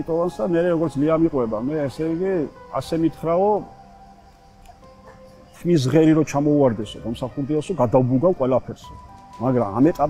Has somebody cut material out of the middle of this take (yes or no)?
no